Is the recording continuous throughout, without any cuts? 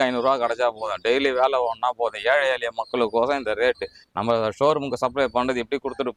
yes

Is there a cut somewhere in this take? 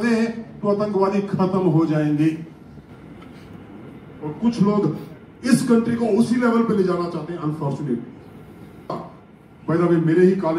yes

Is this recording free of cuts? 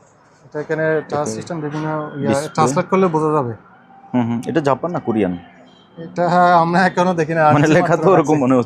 yes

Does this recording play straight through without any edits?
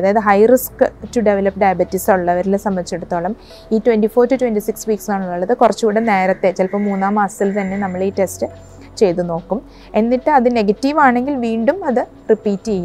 yes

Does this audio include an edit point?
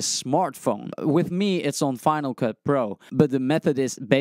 yes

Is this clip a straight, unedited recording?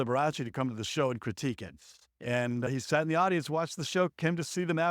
yes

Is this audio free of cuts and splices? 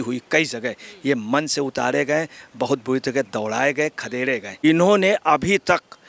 no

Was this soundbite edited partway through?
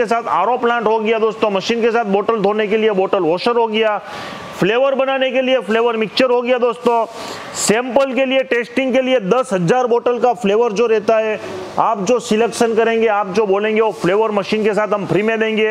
no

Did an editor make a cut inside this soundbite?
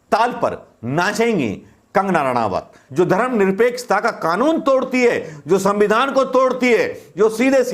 yes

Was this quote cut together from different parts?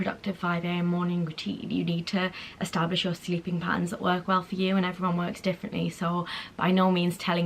no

